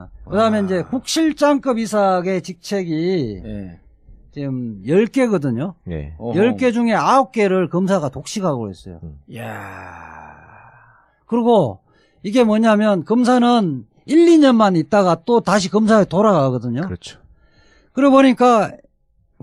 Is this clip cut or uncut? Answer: uncut